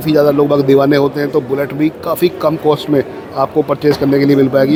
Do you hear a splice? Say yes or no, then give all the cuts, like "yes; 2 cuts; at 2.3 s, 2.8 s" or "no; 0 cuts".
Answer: no; 0 cuts